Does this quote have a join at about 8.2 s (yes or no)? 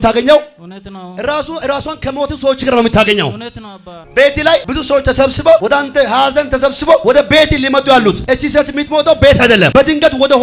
yes